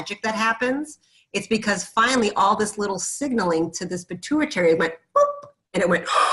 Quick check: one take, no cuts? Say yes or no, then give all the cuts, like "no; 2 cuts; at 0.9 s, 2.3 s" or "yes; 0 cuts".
yes; 0 cuts